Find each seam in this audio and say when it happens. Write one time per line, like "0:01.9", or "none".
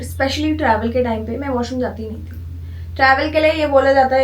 none